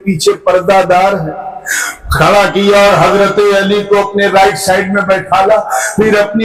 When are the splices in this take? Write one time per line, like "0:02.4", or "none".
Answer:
none

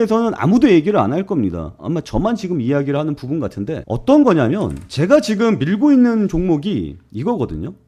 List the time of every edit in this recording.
none

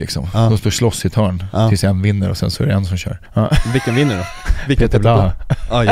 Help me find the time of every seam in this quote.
0:03.3

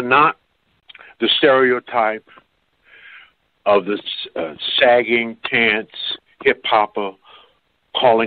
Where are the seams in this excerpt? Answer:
none

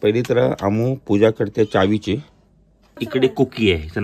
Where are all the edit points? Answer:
0:03.0

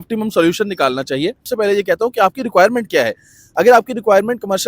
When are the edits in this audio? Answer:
0:01.4

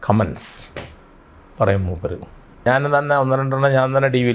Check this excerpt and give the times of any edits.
0:02.6

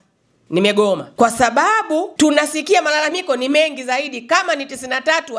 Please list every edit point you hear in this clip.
0:01.1
0:02.1

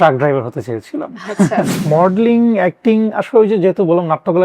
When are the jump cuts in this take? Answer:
0:01.7

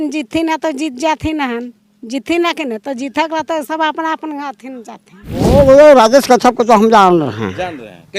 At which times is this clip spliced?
0:05.5

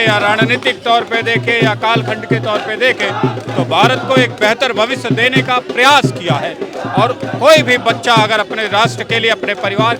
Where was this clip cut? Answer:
none

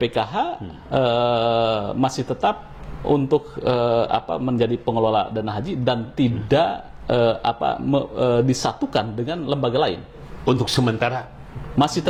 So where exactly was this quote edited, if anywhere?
none

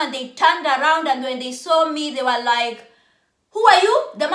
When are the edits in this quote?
none

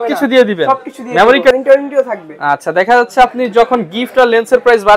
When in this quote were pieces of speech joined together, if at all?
0:01.5

